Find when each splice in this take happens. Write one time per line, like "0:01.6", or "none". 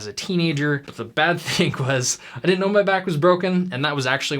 0:01.0